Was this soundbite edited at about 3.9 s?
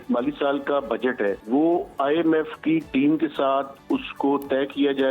no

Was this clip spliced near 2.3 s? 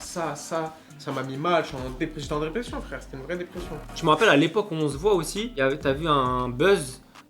no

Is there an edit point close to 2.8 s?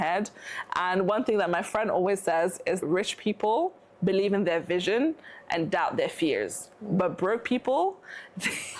yes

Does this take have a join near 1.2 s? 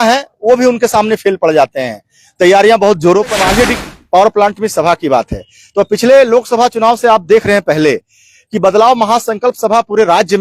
no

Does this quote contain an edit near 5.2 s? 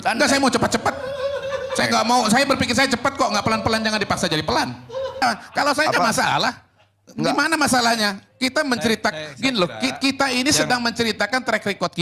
yes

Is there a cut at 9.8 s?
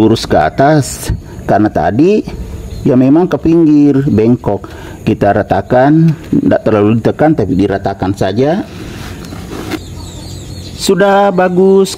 yes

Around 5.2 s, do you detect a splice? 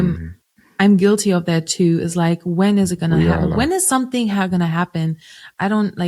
no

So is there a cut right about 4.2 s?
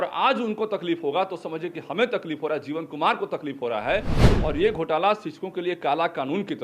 yes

